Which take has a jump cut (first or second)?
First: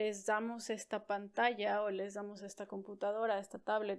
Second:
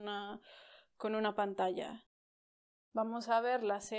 second